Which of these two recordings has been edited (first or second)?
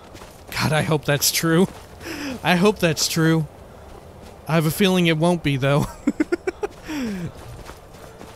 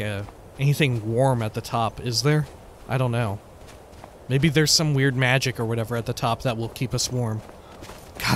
first